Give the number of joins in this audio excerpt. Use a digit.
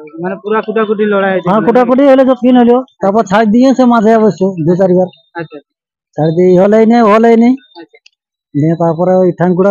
0